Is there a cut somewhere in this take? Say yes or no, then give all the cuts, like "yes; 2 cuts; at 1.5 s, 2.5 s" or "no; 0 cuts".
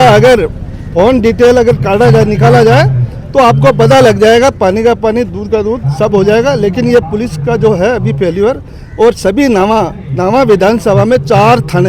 no; 0 cuts